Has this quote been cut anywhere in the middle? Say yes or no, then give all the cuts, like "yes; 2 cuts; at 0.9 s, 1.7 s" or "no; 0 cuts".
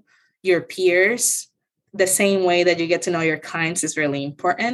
no; 0 cuts